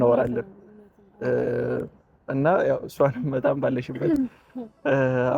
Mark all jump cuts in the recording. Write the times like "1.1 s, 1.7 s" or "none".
none